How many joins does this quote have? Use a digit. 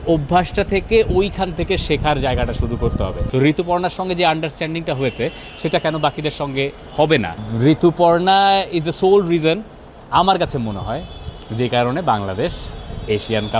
2